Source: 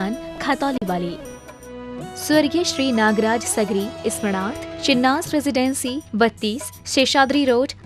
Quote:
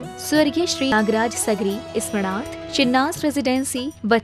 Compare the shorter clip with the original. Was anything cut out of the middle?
yes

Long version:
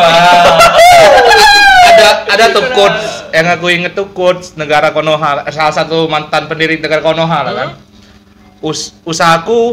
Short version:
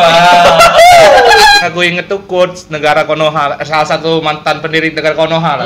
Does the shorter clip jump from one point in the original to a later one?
yes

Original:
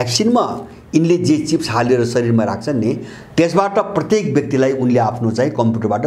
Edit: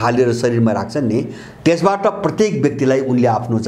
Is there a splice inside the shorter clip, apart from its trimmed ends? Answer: no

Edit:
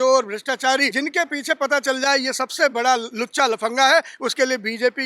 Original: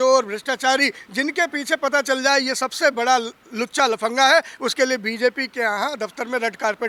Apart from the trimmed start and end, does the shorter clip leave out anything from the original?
yes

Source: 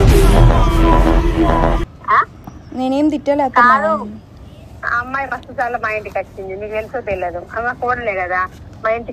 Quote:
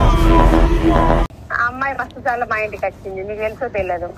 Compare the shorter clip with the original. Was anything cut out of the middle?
yes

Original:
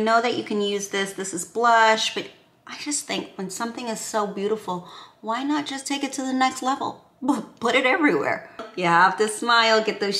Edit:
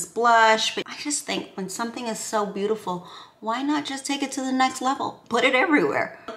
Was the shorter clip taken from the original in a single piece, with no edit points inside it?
no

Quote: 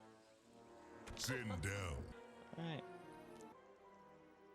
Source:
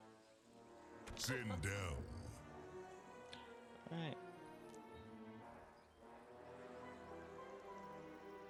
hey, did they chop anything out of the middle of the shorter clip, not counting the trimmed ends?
yes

